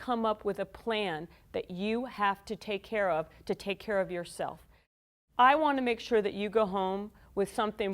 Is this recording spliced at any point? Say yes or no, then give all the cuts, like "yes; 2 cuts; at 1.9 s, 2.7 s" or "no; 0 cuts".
yes; 1 cut; at 4.6 s